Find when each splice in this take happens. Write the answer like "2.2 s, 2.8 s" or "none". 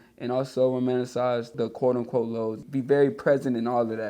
1.5 s, 2.6 s